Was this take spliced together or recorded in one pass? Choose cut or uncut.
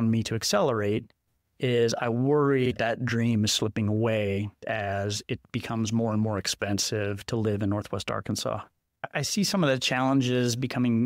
cut